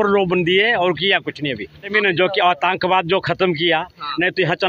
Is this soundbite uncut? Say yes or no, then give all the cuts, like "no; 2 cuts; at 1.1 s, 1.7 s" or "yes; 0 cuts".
no; 1 cut; at 1.9 s